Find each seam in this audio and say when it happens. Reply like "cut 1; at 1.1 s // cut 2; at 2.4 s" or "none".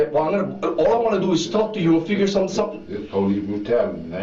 none